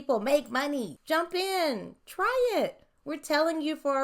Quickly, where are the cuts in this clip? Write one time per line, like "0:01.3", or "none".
0:01.0